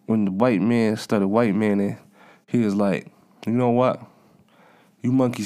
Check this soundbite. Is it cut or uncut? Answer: uncut